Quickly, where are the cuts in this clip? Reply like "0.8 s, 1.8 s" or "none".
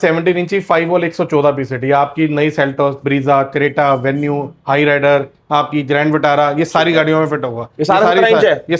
none